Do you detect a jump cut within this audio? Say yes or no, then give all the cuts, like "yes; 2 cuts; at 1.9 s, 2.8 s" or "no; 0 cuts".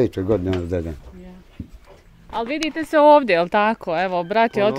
yes; 1 cut; at 2.2 s